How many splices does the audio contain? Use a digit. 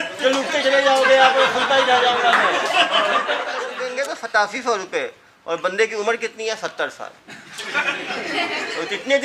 1